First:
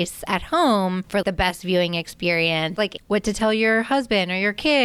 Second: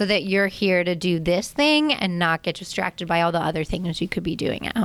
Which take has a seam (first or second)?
first